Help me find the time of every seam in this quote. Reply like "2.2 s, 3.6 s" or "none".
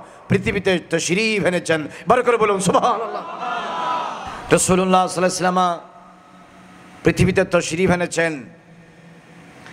4.4 s